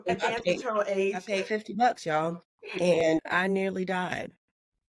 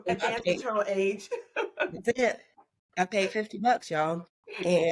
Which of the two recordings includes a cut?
first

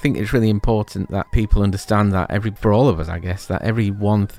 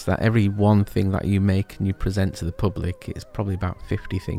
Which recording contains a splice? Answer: first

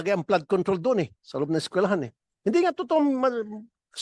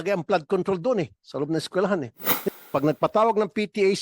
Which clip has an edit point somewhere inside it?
second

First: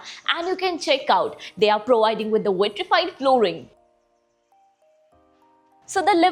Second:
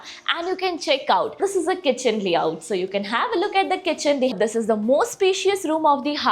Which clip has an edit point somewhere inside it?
second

